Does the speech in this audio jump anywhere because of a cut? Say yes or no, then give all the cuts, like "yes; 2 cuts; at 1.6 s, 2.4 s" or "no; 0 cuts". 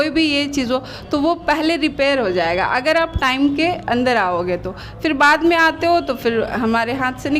no; 0 cuts